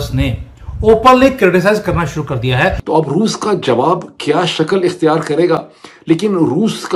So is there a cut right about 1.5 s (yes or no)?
no